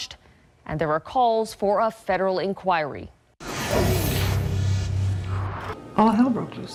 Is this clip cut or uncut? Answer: uncut